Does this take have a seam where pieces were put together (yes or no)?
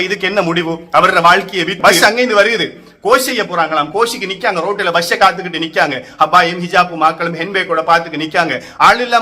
yes